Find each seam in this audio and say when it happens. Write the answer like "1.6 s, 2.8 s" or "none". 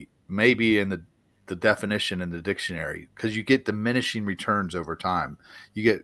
none